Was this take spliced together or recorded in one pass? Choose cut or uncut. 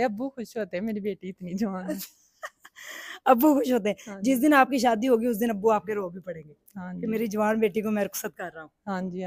uncut